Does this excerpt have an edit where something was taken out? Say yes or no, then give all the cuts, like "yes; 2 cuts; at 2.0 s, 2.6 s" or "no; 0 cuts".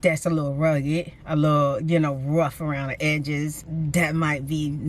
yes; 1 cut; at 3.6 s